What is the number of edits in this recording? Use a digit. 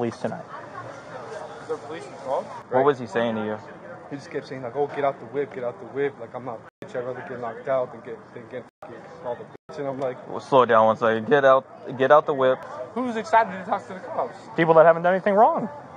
2